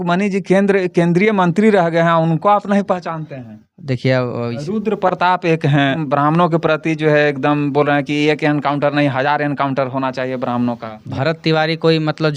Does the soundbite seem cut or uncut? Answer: cut